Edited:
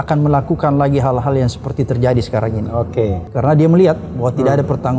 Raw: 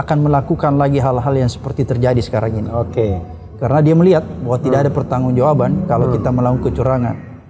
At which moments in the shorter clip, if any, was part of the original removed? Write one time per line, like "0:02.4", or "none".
0:03.2